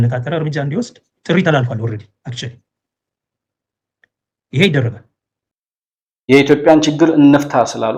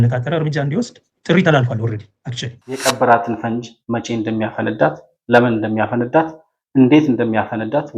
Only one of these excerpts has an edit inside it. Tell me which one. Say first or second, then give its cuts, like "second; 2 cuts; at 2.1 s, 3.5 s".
second; 1 cut; at 2.7 s